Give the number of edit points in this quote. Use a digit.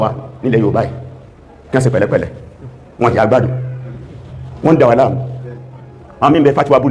0